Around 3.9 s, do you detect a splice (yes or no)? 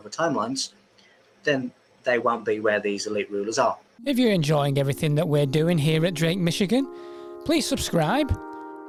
no